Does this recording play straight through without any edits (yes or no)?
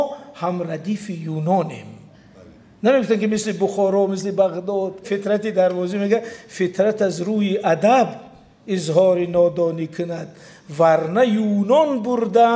no